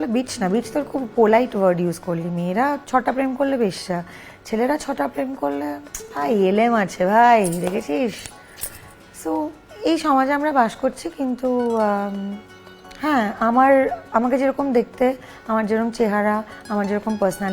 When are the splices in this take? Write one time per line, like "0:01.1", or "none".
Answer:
none